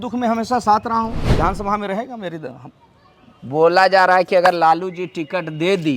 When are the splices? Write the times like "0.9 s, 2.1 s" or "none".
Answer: 1.2 s